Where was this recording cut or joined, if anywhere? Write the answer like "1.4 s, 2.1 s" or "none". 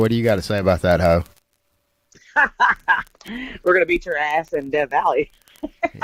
none